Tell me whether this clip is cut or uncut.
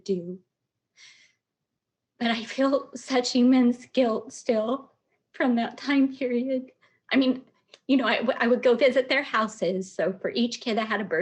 uncut